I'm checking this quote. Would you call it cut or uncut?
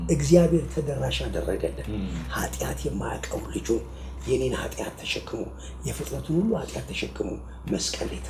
uncut